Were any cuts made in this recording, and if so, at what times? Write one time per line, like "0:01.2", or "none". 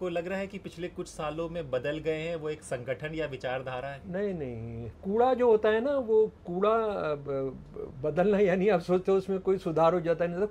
0:05.0